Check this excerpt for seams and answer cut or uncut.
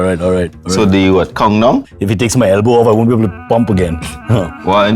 cut